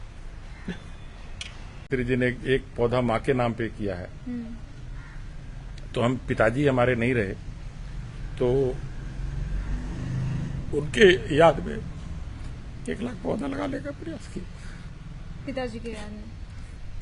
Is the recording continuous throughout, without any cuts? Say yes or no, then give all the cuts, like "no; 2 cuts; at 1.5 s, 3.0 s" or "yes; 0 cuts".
no; 1 cut; at 1.9 s